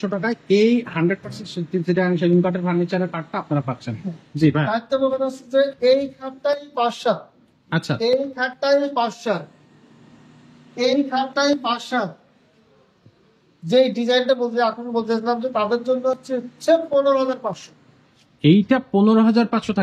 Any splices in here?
no; 0 cuts

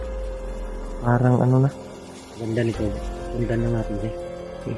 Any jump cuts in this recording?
yes; 1 cut; at 1.0 s

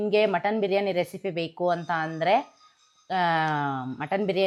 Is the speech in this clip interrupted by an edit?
no; 0 cuts

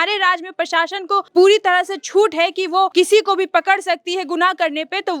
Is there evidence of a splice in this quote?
yes; 2 cuts; at 1.3 s, 2.9 s

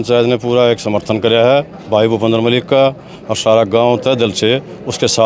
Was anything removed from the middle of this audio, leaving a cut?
no; 0 cuts

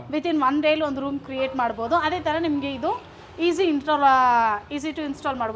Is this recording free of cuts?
yes; 0 cuts

